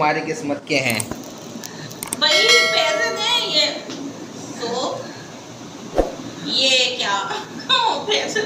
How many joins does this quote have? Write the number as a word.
zero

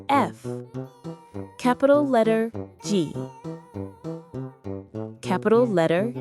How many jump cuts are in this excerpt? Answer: two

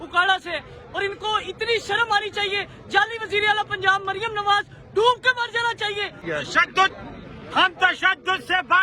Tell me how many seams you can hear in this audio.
one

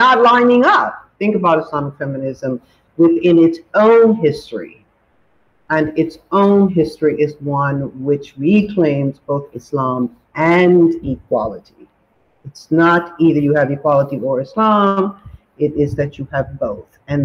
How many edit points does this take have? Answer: one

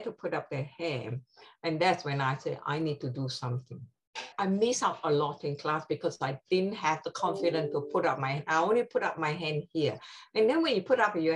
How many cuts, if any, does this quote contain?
one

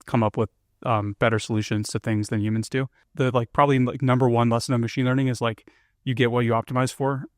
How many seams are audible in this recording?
one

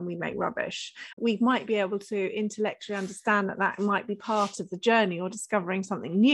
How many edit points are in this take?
one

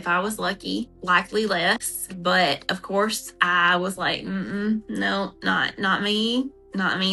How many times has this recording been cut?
zero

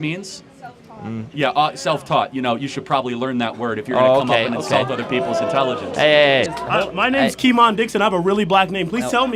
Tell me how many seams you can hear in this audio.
one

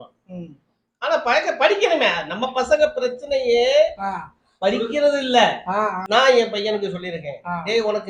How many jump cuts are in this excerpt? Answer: one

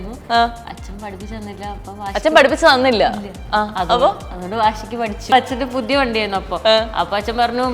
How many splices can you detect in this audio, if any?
one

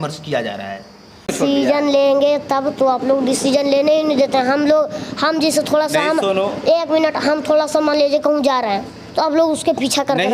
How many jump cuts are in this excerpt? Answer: one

